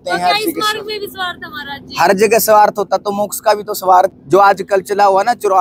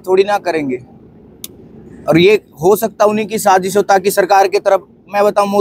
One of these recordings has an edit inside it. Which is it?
first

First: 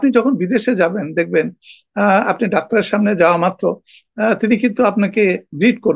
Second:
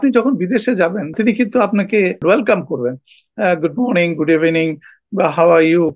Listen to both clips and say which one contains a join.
second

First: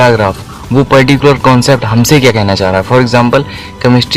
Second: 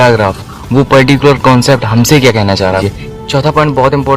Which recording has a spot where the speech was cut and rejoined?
second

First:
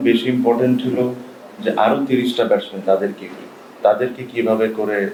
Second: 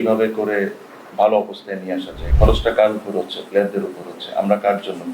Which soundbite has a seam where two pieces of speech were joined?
second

